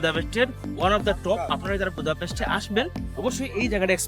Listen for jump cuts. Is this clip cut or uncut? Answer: uncut